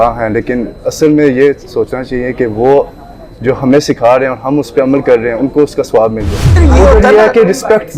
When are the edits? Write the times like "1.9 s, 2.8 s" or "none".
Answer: 6.5 s